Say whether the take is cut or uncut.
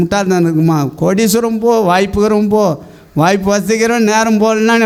uncut